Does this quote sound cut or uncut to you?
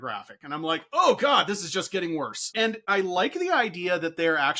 uncut